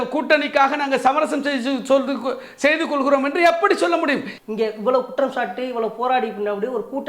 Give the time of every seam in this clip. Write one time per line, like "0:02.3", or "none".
0:04.3